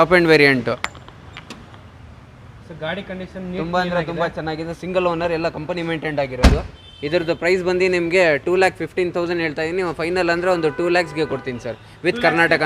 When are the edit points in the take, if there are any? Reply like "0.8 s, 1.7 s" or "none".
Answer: 1.0 s